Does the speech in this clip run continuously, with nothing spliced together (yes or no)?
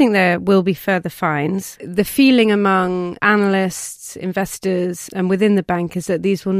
no